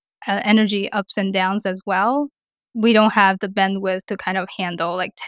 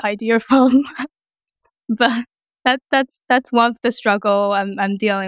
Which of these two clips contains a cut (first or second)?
first